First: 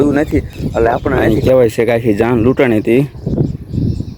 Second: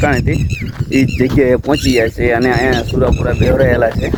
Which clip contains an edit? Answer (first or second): first